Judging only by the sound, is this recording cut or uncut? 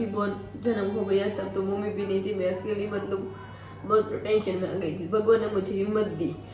uncut